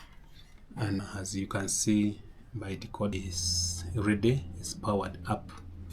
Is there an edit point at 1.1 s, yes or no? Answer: yes